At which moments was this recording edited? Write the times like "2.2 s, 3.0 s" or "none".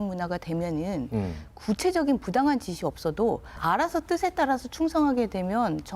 3.5 s